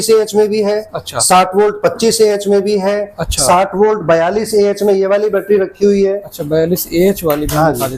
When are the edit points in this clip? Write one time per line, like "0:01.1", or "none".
none